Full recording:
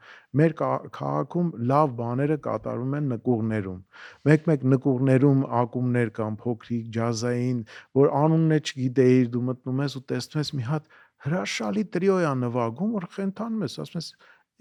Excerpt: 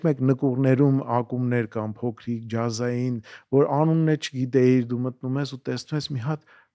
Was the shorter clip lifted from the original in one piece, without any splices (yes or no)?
yes